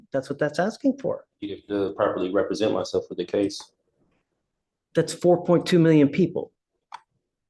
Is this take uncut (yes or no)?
yes